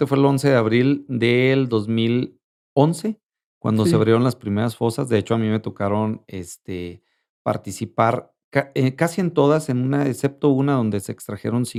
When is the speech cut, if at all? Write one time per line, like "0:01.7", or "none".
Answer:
none